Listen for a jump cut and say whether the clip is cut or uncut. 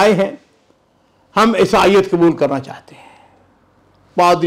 uncut